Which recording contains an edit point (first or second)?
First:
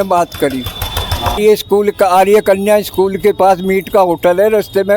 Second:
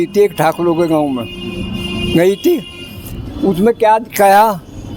first